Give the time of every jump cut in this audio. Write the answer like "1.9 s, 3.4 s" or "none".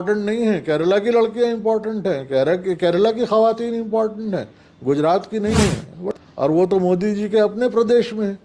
5.9 s